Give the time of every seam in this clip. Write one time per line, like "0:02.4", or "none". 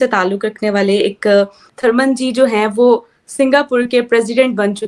0:01.6